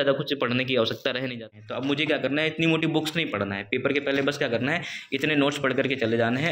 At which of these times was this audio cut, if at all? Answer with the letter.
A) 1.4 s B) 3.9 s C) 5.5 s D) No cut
A